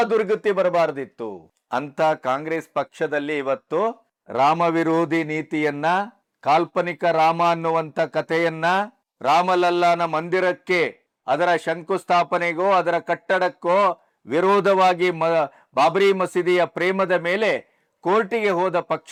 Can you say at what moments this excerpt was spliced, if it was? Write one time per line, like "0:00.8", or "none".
none